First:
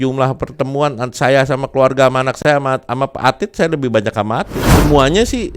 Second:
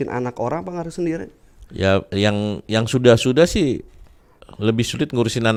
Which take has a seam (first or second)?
first